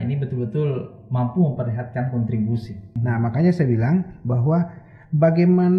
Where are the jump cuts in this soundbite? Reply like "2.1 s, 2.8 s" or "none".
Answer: 2.9 s